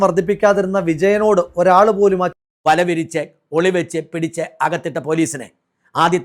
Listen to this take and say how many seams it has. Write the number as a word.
one